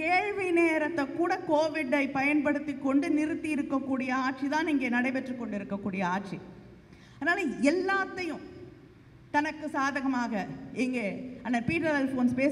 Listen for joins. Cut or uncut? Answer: uncut